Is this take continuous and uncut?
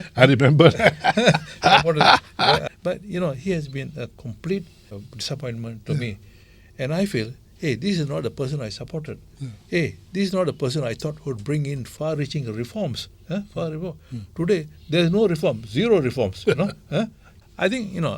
no; 4 cuts; at 2.6 s, 5.0 s, 11.9 s, 17.2 s

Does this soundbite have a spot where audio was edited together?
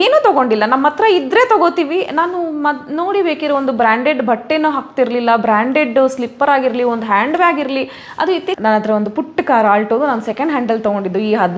yes; 1 cut; at 8.5 s

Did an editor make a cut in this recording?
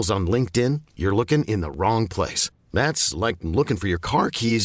no; 0 cuts

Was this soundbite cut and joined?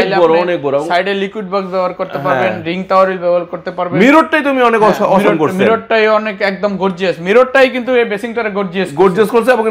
no; 0 cuts

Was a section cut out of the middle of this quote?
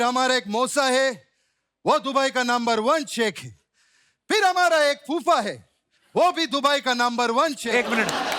no; 0 cuts

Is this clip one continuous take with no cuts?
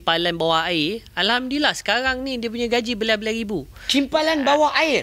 yes; 0 cuts

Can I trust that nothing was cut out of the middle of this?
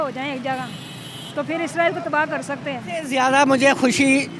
no; 1 cut; at 3.1 s

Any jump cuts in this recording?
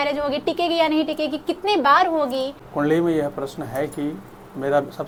no; 0 cuts

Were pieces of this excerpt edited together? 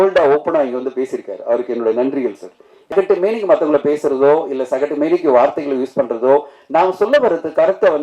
yes; 1 cut; at 2.9 s

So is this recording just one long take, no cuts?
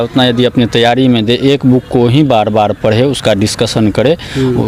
yes; 0 cuts

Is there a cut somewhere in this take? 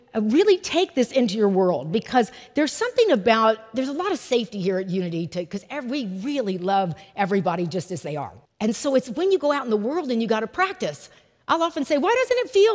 yes; 1 cut; at 8.4 s

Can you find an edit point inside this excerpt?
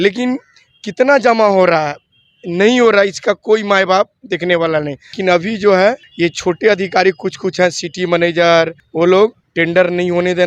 yes; 4 cuts; at 5.2 s, 6.1 s, 8.8 s, 9.4 s

